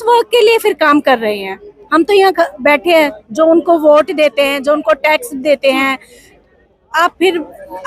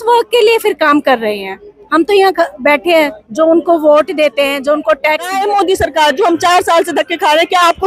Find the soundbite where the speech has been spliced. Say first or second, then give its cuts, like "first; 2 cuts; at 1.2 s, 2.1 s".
second; 1 cut; at 5.4 s